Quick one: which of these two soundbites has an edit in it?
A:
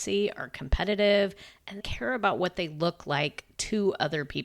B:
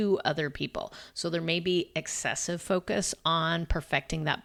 A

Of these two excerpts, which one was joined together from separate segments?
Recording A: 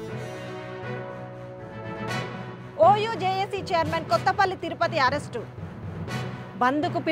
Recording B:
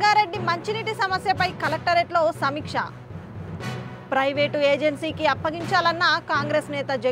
A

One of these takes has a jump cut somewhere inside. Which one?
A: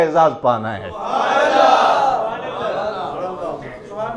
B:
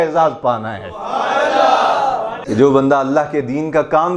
B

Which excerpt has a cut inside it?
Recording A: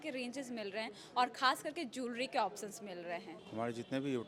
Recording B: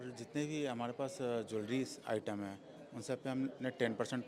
A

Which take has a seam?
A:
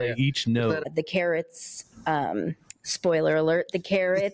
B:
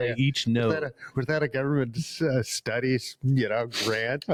A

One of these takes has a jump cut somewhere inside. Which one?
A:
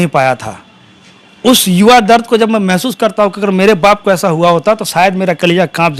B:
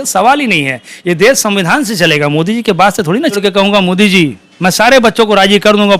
B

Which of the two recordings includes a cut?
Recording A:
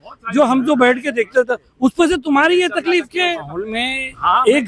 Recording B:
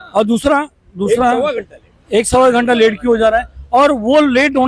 A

